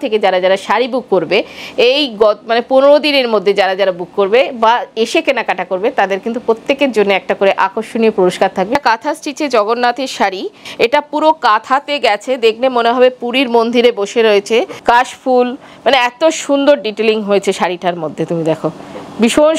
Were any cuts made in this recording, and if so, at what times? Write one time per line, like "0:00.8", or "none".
0:08.8
0:10.6
0:14.7